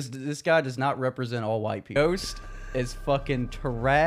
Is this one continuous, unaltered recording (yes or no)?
no